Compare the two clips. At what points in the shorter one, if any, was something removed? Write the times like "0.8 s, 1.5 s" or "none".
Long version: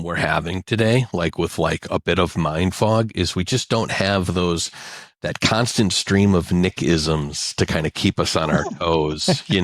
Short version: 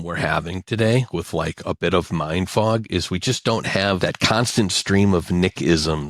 1.1 s, 4.0 s